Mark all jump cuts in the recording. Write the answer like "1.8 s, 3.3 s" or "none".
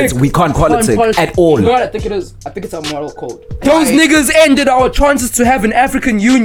3.4 s